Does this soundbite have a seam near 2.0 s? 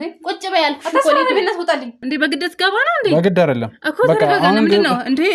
yes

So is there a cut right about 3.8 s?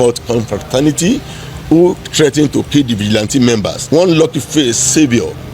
yes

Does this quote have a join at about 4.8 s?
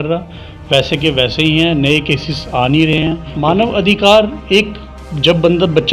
no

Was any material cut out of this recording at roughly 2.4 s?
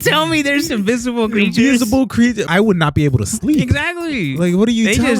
yes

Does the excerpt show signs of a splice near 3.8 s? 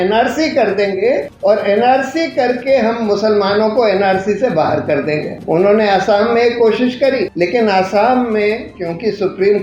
no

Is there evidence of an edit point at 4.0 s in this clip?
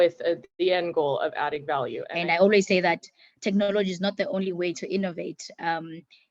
no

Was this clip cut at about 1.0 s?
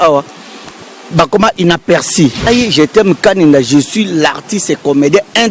no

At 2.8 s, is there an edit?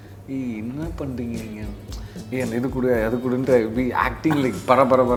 no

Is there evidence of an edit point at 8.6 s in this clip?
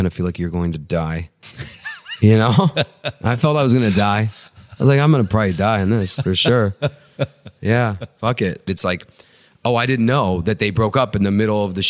yes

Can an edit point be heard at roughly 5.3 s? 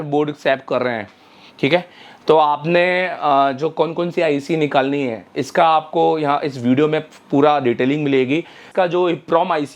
no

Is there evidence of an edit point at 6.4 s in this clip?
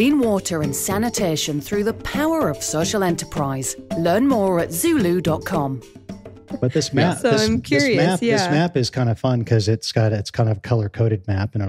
yes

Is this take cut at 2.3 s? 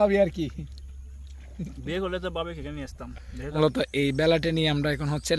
no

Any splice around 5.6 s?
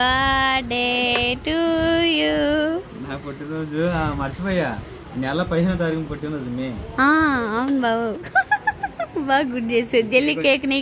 no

